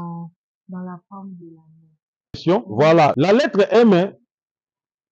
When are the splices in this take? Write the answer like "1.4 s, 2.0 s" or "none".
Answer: 3.1 s